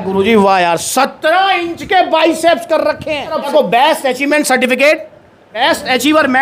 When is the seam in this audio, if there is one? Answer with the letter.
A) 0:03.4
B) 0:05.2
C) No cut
A